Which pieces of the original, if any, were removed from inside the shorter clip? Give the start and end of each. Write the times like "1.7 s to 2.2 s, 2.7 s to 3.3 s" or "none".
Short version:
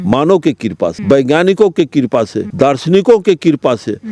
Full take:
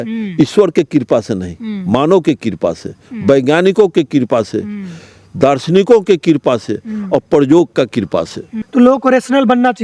2.8 s to 3.2 s, 4.6 s to 5.2 s